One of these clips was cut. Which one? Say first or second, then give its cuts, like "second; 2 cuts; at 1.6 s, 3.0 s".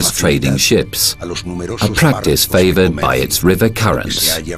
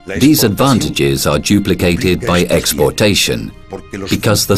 first; 1 cut; at 1.4 s